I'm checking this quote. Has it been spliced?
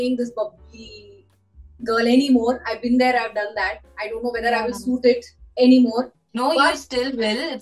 yes; 1 cut; at 6.2 s

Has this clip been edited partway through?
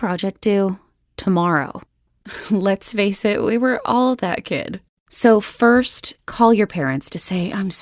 no; 0 cuts

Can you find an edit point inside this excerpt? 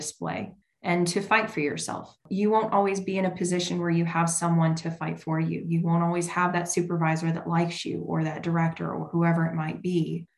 no; 0 cuts

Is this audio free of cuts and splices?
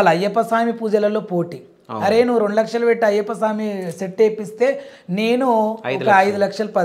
yes; 0 cuts

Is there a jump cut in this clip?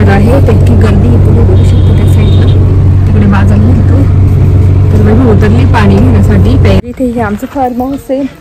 yes; 1 cut; at 6.8 s

